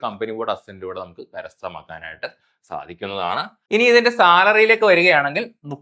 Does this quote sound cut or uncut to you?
cut